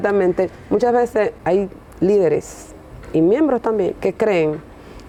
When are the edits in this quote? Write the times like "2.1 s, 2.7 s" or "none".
none